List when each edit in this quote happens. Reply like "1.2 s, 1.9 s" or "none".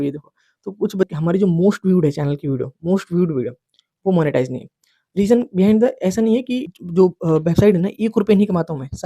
1.1 s, 6.7 s